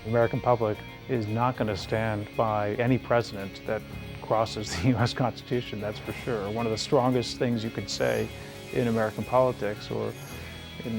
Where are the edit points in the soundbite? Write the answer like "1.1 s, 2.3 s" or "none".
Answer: 0.9 s